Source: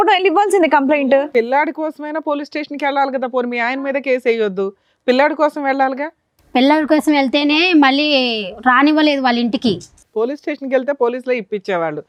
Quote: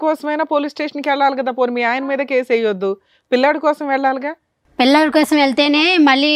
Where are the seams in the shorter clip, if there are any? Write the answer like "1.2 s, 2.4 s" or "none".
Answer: none